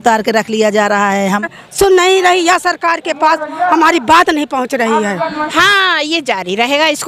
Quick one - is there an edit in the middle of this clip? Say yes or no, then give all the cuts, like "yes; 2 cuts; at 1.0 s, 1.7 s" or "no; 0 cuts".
yes; 2 cuts; at 1.4 s, 5.5 s